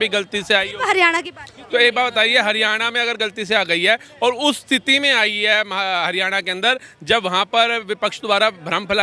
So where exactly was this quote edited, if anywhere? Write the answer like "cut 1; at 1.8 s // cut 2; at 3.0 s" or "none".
none